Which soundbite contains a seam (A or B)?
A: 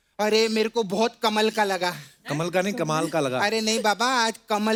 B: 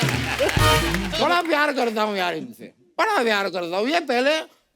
B